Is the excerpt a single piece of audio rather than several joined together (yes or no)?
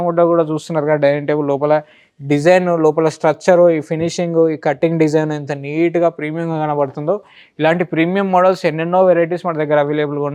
yes